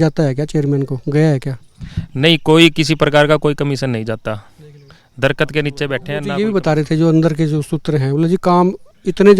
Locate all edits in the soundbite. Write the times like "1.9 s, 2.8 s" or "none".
6.1 s